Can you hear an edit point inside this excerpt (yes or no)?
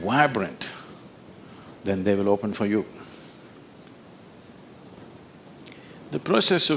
no